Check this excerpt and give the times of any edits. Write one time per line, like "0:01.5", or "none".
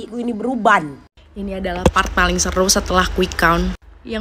0:01.0